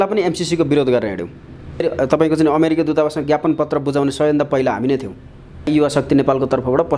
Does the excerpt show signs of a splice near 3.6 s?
no; 2 cuts; at 1.8 s, 5.7 s

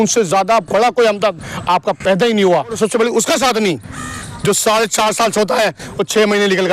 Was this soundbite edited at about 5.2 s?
no; 1 cut; at 2.7 s

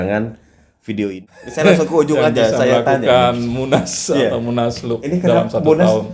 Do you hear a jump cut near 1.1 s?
yes; 1 cut; at 1.1 s

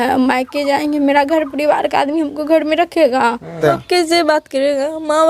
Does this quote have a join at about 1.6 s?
no; 1 cut; at 3.6 s

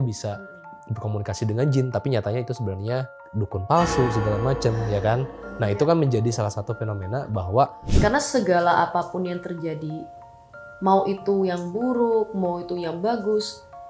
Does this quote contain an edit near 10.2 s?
no; 2 cuts; at 3.2 s, 7.9 s

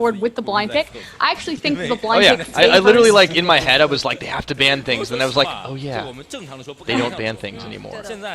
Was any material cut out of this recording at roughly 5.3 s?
yes; 1 cut; at 5.3 s

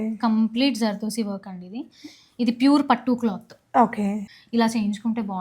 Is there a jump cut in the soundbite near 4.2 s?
yes; 1 cut; at 4.2 s

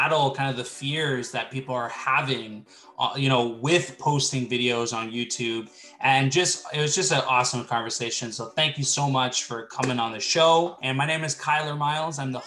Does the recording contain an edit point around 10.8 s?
yes; 1 cut; at 10.8 s

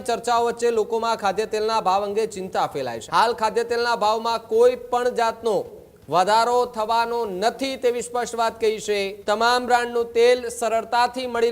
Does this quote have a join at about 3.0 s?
yes; 2 cuts; at 3.0 s, 9.1 s

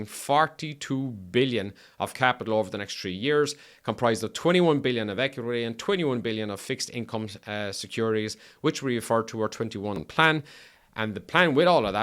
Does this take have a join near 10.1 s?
yes; 1 cut; at 10.1 s

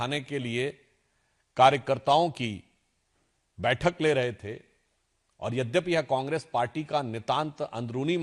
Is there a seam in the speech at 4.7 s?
no; 0 cuts

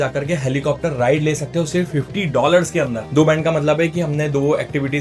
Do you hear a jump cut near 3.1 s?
yes; 1 cut; at 3.1 s

